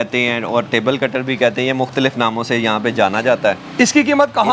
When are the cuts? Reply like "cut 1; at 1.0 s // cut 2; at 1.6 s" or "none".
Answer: none